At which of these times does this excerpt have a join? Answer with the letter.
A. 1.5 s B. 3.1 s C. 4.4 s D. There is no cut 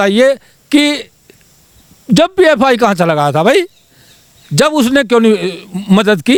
D